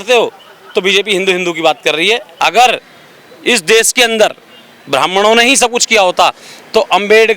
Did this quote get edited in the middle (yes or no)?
yes